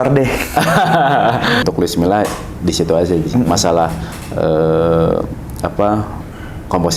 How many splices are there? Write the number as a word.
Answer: one